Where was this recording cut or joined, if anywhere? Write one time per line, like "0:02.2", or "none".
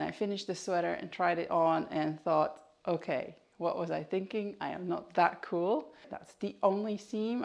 0:06.2